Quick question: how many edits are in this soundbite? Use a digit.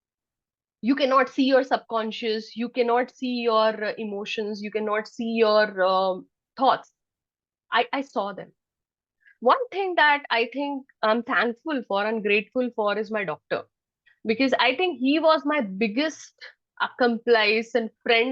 1